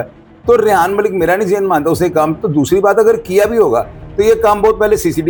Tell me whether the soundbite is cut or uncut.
uncut